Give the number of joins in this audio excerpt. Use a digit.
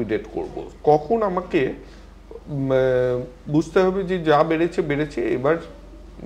0